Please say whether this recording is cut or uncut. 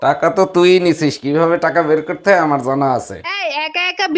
uncut